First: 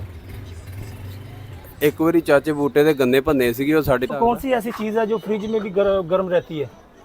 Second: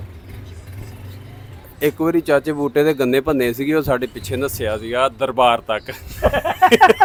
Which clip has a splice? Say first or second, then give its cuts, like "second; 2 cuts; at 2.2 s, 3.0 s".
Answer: first; 1 cut; at 4.2 s